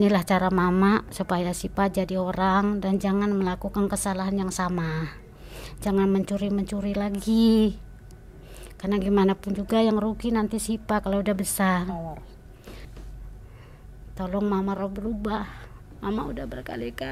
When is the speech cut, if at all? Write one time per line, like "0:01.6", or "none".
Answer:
0:12.8